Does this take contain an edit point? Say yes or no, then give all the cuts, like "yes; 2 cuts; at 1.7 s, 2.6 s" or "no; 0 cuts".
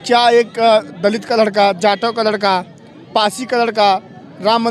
no; 0 cuts